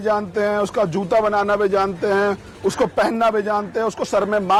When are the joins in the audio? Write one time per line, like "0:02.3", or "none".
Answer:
none